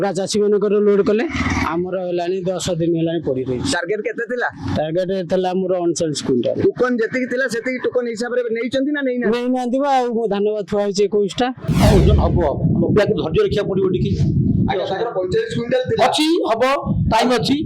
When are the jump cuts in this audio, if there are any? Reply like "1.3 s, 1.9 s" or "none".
11.6 s